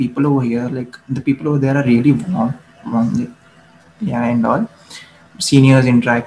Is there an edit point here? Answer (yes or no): no